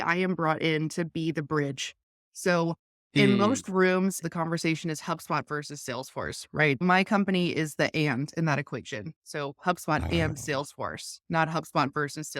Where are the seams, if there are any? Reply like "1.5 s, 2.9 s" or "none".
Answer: 4.2 s, 6.8 s